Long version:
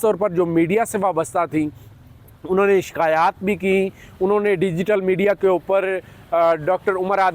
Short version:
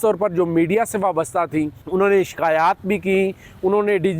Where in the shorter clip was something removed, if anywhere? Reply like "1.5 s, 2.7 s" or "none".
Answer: 1.8 s